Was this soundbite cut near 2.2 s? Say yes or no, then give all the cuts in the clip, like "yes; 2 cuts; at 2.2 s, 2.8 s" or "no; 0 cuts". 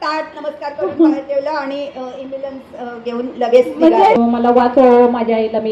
no; 1 cut; at 4.2 s